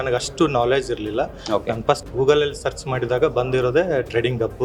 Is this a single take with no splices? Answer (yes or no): no